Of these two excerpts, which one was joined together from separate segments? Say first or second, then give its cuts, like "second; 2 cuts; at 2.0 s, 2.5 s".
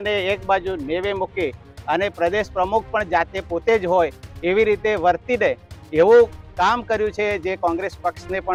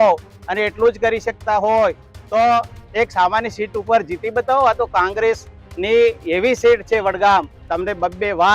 second; 1 cut; at 7.6 s